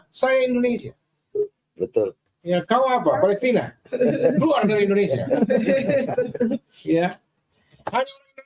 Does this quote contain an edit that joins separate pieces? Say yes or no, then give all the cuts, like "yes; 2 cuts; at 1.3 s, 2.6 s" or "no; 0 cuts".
no; 0 cuts